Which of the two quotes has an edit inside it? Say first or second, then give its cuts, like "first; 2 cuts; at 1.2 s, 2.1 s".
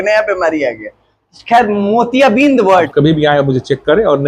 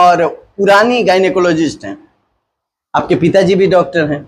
first; 1 cut; at 2.9 s